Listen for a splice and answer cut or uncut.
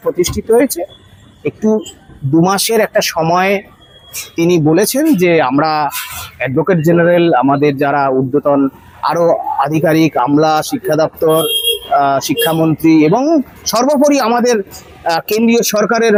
uncut